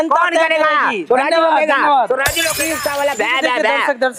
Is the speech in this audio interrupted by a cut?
yes; 1 cut; at 2.6 s

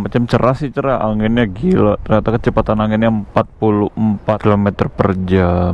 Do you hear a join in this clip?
yes; 1 cut; at 4.4 s

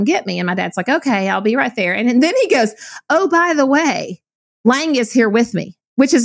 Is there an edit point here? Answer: no; 0 cuts

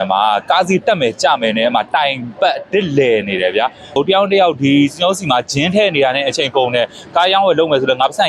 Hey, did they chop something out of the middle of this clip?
yes; 1 cut; at 4.0 s

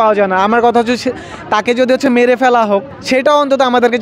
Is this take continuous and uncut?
no; 1 cut; at 3.0 s

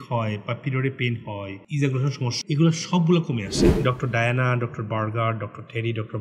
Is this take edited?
yes; 2 cuts; at 2.3 s, 3.6 s

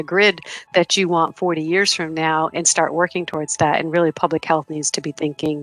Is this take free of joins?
yes; 0 cuts

